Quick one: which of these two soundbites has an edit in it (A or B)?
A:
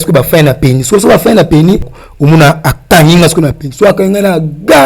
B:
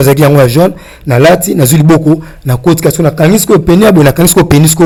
A